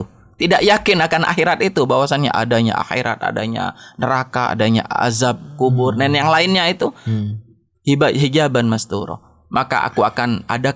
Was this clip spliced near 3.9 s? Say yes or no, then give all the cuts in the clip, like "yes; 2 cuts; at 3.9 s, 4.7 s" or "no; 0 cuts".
no; 0 cuts